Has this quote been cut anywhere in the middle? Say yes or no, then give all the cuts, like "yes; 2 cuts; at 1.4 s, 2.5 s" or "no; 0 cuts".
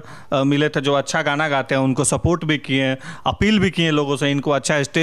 no; 0 cuts